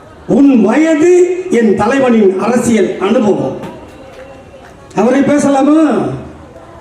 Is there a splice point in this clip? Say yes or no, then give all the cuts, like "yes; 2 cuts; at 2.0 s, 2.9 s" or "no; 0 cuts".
no; 0 cuts